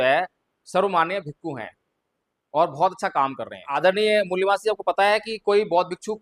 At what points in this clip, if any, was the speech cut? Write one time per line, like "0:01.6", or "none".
0:03.8